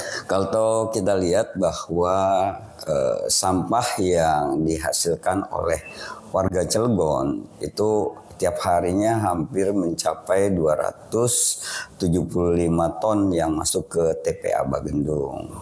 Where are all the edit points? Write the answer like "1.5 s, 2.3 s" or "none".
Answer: none